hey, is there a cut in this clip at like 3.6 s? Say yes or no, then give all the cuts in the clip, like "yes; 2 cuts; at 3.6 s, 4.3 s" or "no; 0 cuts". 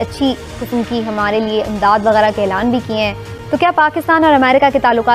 yes; 1 cut; at 3.6 s